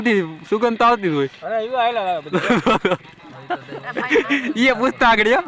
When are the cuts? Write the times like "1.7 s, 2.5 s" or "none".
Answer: none